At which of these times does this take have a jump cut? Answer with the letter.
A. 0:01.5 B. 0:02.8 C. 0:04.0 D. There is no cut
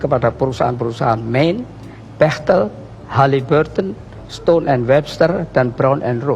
D